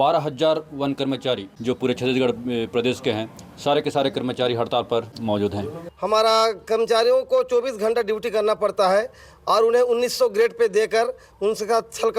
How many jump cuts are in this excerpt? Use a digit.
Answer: 2